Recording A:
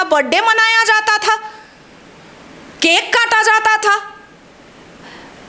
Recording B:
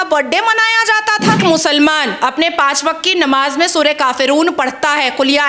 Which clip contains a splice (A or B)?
B